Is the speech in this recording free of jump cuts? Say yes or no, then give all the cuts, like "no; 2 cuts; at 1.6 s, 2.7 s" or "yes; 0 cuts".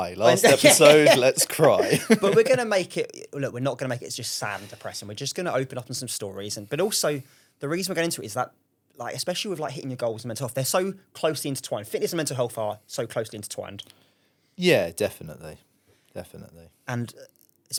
yes; 0 cuts